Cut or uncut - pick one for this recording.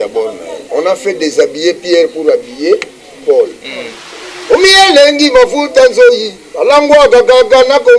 cut